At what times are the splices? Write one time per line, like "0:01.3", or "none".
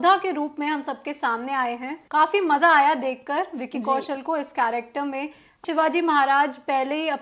0:01.9
0:05.6